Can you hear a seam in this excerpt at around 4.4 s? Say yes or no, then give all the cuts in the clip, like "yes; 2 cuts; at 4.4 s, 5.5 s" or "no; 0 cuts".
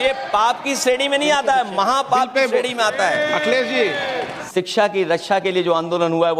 yes; 1 cut; at 4.4 s